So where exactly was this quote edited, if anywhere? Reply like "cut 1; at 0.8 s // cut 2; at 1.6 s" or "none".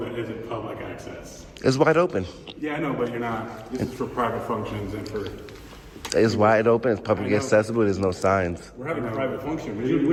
none